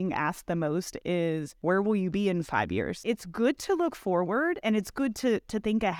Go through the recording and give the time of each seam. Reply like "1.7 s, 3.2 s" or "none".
1.5 s, 3.0 s, 4.6 s